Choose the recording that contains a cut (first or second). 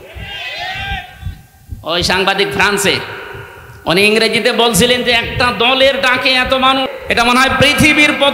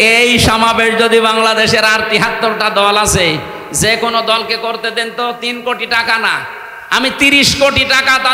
first